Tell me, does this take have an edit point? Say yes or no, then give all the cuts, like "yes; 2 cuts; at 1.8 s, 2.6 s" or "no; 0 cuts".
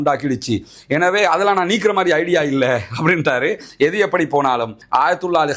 yes; 1 cut; at 3.6 s